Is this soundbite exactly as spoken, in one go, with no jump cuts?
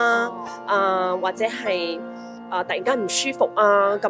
yes; 0 cuts

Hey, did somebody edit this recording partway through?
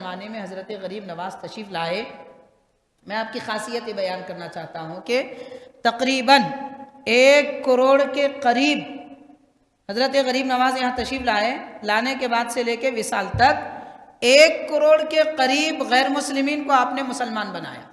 no; 0 cuts

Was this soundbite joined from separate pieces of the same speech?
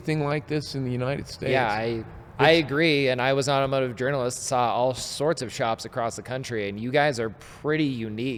no; 0 cuts

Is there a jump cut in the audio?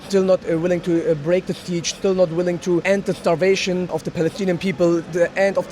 yes; 2 cuts; at 2.8 s, 3.9 s

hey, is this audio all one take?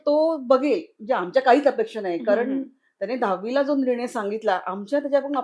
yes; 0 cuts

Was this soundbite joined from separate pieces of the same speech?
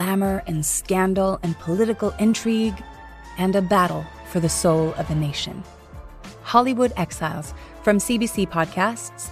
no; 0 cuts

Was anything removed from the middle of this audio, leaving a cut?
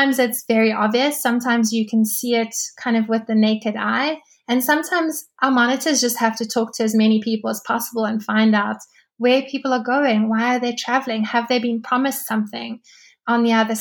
no; 0 cuts

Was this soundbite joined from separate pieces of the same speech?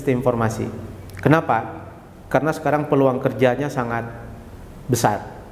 no; 0 cuts

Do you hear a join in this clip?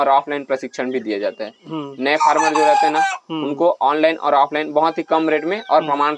no; 0 cuts

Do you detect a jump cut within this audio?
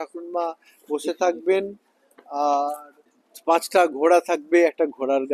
no; 0 cuts

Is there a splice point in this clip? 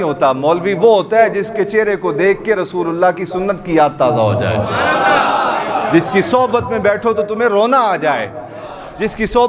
no; 0 cuts

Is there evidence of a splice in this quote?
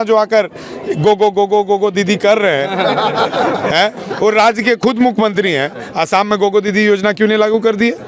no; 0 cuts

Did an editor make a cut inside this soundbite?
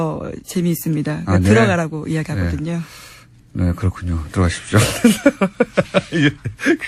no; 0 cuts

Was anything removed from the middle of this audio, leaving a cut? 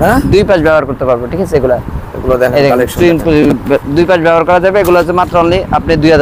no; 0 cuts

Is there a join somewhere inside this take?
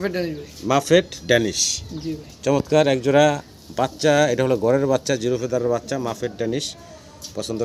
no; 0 cuts

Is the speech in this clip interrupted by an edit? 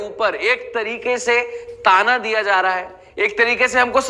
no; 0 cuts

